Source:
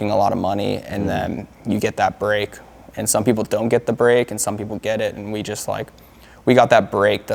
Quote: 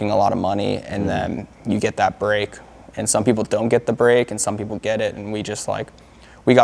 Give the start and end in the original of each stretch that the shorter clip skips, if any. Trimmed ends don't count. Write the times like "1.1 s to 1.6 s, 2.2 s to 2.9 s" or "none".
none